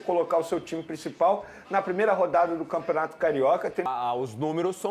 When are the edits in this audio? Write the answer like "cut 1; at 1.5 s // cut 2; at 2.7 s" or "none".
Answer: cut 1; at 3.9 s